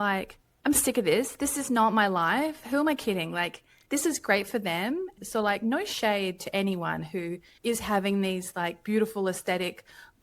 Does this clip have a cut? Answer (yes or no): yes